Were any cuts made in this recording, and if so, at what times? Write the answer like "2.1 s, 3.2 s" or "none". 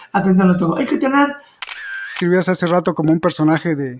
1.8 s